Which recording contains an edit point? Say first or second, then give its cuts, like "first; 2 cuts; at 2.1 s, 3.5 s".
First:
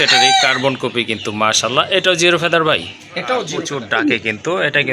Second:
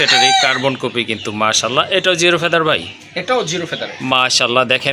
first; 1 cut; at 4.0 s